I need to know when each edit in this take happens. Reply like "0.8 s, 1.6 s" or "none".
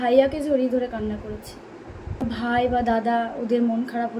2.2 s